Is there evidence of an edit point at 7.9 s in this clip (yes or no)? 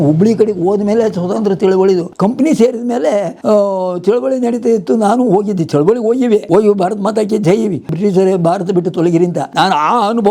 yes